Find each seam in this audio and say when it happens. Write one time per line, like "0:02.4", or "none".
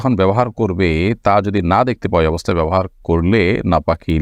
none